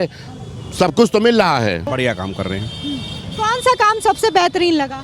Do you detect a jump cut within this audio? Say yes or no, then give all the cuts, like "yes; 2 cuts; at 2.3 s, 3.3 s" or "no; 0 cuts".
yes; 1 cut; at 1.8 s